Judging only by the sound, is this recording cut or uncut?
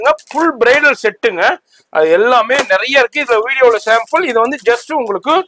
uncut